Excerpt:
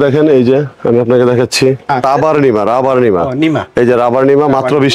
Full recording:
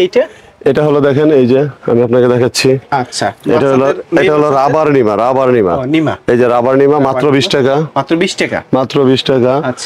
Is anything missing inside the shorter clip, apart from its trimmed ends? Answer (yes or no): yes